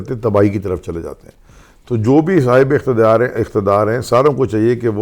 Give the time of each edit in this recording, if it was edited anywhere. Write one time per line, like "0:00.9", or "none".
none